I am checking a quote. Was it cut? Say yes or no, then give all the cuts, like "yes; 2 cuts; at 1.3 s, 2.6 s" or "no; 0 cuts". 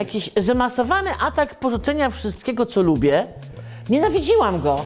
no; 0 cuts